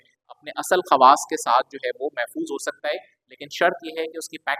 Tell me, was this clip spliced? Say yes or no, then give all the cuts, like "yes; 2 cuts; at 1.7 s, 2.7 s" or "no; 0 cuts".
no; 0 cuts